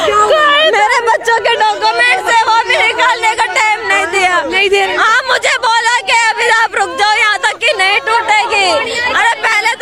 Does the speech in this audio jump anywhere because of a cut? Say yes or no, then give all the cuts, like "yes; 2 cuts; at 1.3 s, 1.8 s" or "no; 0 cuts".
no; 0 cuts